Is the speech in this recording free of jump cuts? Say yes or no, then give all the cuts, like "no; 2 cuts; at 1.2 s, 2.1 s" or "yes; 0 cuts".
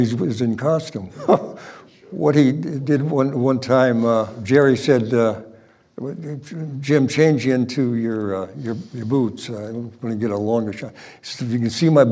no; 2 cuts; at 1.2 s, 4.4 s